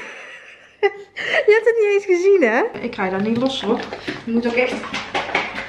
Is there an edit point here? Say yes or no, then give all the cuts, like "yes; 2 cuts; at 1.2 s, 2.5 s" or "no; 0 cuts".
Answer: yes; 1 cut; at 2.8 s